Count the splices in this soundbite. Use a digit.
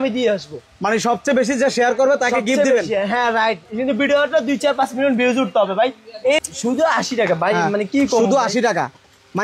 1